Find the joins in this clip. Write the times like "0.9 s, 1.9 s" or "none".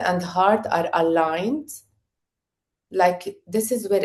none